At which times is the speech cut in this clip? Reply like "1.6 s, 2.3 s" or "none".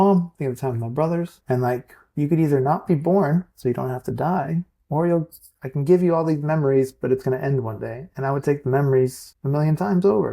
1.4 s, 9.3 s